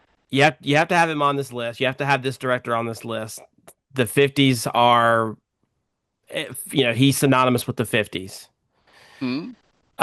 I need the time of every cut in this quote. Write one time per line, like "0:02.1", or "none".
none